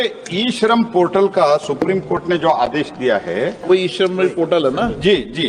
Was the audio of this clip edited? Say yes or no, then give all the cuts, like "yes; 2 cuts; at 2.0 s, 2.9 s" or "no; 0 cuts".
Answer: yes; 1 cut; at 3.6 s